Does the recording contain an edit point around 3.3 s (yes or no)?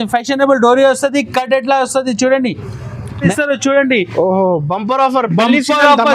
yes